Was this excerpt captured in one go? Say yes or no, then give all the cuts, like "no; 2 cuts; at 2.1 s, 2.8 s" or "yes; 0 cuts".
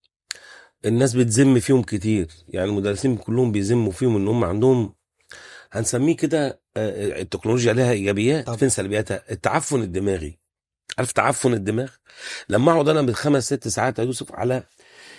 yes; 0 cuts